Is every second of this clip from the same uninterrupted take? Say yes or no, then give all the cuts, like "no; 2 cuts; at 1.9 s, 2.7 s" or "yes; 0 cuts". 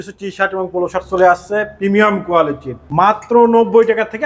no; 1 cut; at 3.2 s